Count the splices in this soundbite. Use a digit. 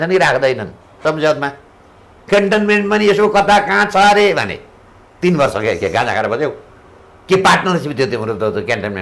1